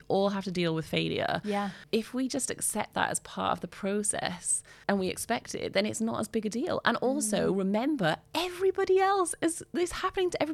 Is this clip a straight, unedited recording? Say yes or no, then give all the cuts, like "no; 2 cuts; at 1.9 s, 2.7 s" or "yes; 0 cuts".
yes; 0 cuts